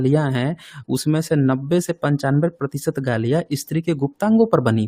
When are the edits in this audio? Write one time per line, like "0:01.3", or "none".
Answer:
none